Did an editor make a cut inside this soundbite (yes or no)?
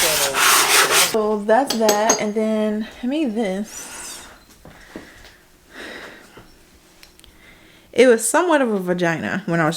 yes